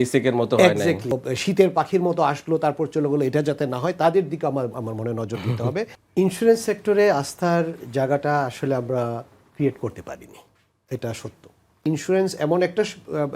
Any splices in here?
yes; 3 cuts; at 1.3 s, 6.0 s, 11.8 s

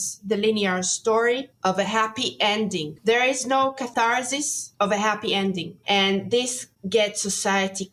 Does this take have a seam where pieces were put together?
yes; 2 cuts; at 2.9 s, 3.9 s

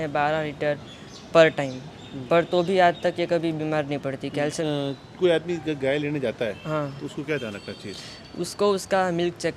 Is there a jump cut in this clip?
yes; 1 cut; at 4.6 s

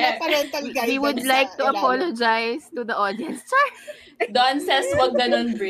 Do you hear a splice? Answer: yes; 1 cut; at 4.0 s

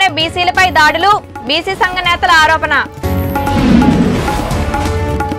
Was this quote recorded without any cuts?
yes; 0 cuts

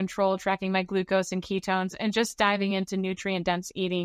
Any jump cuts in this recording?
no; 0 cuts

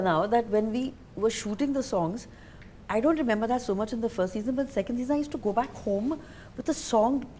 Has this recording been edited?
no; 0 cuts

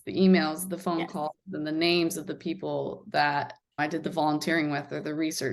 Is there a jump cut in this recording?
no; 0 cuts

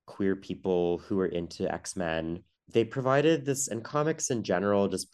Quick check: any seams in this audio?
no; 0 cuts

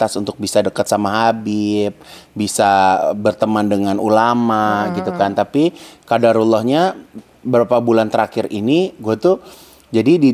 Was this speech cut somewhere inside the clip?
no; 0 cuts

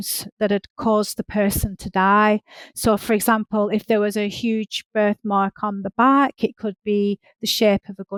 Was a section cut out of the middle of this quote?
no; 0 cuts

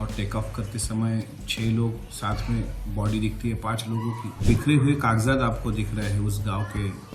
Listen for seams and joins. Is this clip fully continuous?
no; 1 cut; at 4.3 s

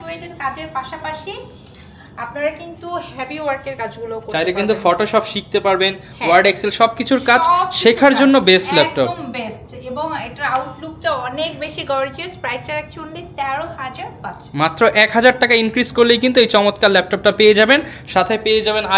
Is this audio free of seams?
yes; 0 cuts

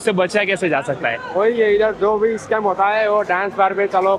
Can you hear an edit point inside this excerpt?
no; 0 cuts

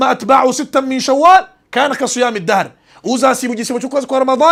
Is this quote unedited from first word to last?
yes; 0 cuts

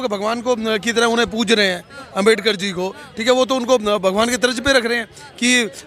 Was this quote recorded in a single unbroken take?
yes; 0 cuts

